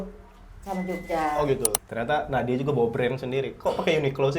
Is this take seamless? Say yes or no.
no